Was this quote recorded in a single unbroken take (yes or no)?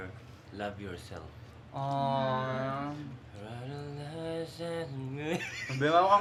yes